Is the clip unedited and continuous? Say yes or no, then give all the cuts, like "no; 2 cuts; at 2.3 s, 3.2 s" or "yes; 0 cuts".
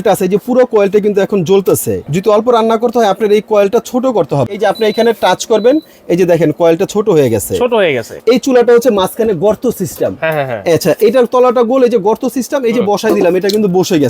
no; 3 cuts; at 2.0 s, 4.6 s, 8.1 s